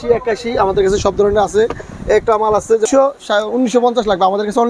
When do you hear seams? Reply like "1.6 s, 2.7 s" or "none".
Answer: 2.9 s